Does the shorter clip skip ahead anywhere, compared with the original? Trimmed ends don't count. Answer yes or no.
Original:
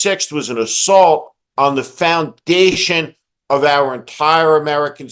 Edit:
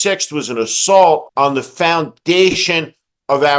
yes